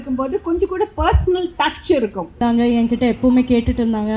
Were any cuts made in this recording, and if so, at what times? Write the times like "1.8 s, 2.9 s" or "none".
2.4 s

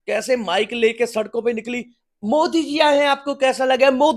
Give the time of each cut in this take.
none

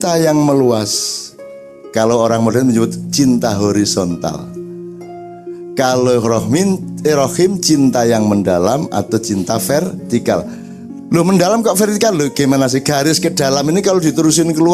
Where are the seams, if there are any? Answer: 4.3 s, 5.8 s

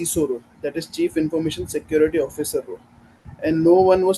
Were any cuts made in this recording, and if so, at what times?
none

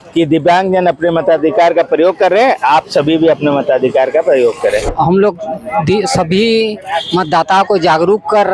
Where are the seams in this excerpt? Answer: 4.9 s

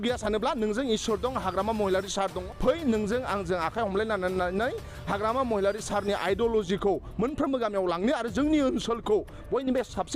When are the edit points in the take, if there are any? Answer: 2.4 s

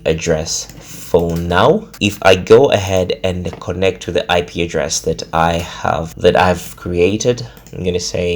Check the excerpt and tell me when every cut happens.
1.9 s, 6.1 s

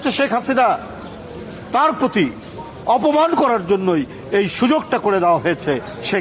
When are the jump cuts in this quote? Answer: none

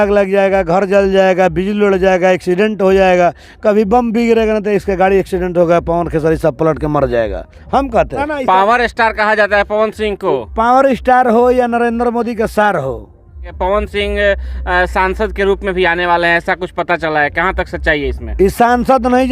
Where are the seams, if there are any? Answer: 8.2 s, 13.5 s

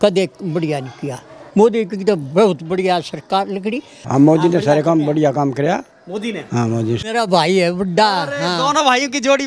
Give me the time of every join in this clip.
1.4 s, 4.0 s, 7.1 s

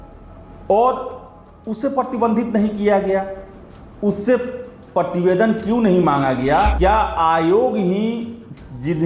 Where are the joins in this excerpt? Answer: 6.7 s

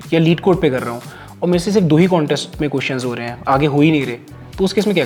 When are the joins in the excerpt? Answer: none

